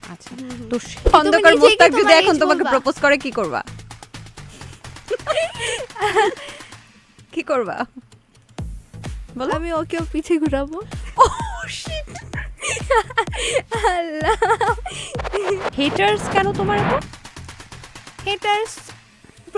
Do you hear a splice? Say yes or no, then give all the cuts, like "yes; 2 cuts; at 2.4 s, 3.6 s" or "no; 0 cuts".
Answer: yes; 2 cuts; at 1.1 s, 15.7 s